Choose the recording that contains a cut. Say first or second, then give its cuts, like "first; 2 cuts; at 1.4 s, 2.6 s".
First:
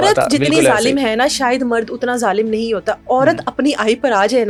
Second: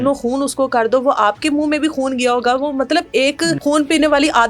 second; 1 cut; at 3.6 s